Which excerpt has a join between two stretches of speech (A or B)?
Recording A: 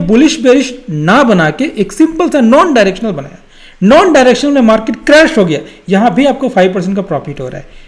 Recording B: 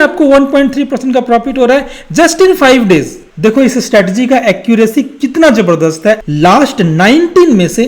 B